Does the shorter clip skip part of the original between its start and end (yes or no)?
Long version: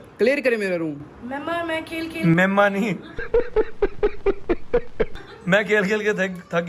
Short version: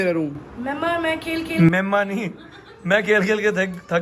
yes